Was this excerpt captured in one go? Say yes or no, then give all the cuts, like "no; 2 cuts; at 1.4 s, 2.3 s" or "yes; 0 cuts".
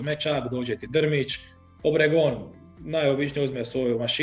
yes; 0 cuts